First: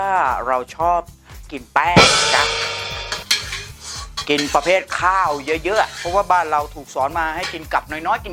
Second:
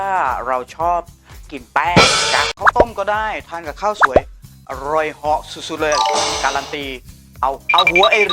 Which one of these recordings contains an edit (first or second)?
second